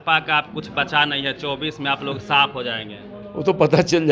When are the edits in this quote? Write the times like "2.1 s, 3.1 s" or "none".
none